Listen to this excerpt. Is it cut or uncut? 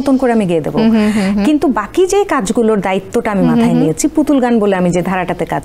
uncut